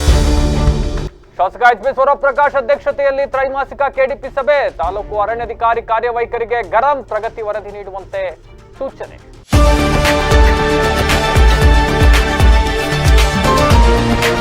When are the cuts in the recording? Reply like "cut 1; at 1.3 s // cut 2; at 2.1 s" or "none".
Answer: cut 1; at 9.3 s